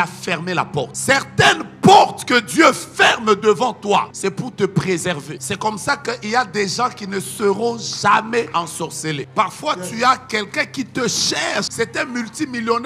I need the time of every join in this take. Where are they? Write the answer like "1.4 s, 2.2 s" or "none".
1.0 s, 4.1 s, 5.3 s, 8.8 s, 11.7 s